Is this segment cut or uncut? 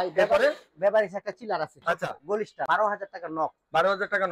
cut